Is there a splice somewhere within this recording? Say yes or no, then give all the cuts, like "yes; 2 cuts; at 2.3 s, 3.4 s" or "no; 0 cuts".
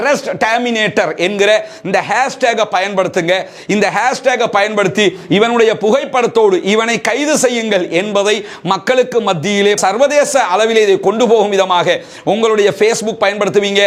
no; 0 cuts